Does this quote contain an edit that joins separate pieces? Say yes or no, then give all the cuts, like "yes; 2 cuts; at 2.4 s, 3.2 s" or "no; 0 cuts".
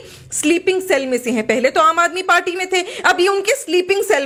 no; 0 cuts